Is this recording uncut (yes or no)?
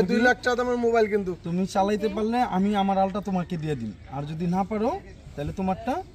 yes